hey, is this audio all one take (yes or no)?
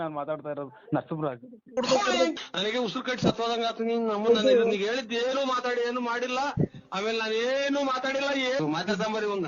no